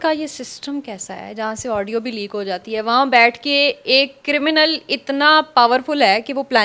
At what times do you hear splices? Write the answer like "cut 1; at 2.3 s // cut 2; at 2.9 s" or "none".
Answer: none